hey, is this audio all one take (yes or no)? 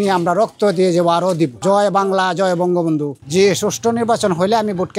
no